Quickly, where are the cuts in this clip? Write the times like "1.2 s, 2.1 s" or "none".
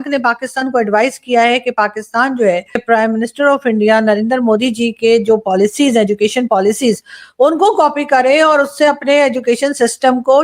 2.8 s